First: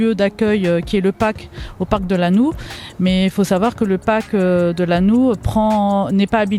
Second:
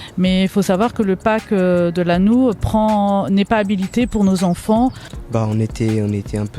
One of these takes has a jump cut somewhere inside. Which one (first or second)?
second